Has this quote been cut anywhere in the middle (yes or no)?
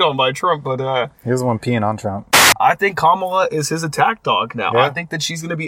yes